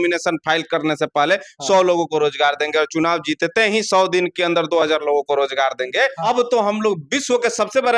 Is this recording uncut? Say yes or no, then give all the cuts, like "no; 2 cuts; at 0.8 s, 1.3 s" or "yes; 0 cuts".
no; 1 cut; at 6.2 s